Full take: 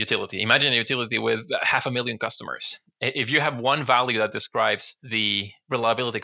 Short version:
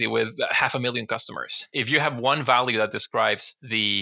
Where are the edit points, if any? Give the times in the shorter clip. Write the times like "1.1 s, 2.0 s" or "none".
1.7 s